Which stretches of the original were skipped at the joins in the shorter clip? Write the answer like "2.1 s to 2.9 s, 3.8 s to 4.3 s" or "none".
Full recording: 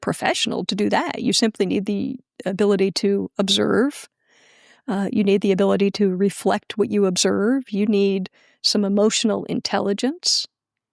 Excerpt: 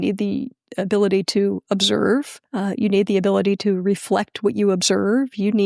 4.1 s to 4.7 s